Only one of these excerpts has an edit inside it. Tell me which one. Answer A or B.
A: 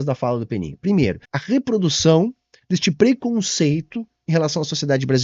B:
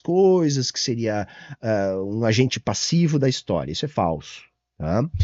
A